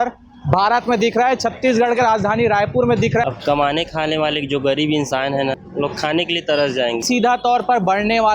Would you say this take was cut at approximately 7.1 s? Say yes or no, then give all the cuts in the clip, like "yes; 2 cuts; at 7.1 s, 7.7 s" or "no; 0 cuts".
yes; 3 cuts; at 3.2 s, 5.6 s, 7.1 s